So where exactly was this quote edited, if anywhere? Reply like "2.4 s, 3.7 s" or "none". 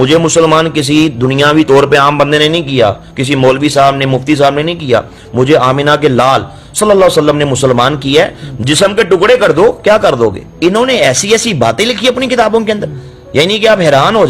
10.5 s